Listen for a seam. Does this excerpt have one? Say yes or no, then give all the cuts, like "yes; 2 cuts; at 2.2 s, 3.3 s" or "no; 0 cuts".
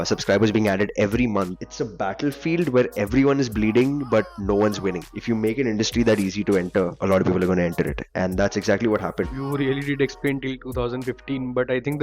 yes; 3 cuts; at 1.6 s, 5.1 s, 9.3 s